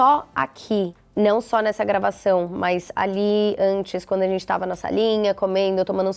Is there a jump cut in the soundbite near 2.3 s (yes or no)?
no